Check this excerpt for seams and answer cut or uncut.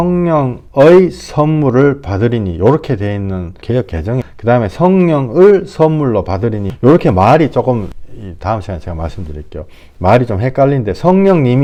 uncut